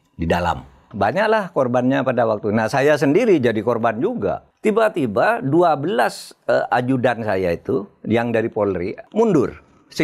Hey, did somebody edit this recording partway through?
yes; 3 cuts; at 0.9 s, 4.5 s, 9.0 s

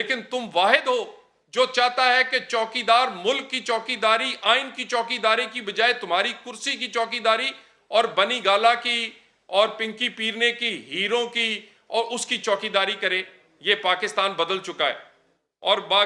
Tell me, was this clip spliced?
no; 0 cuts

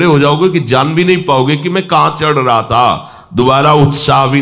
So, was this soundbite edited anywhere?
no; 0 cuts

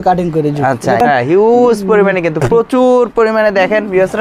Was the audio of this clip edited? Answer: yes; 1 cut; at 1.0 s

